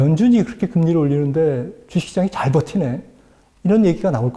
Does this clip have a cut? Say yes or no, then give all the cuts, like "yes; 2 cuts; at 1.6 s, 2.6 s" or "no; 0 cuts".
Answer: no; 0 cuts